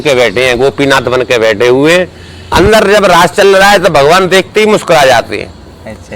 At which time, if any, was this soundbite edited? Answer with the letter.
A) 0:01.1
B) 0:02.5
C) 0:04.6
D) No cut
B